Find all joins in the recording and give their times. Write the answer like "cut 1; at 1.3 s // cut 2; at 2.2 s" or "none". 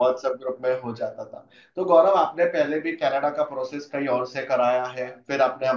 none